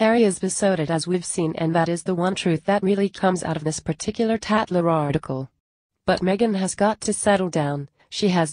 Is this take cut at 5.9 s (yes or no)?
yes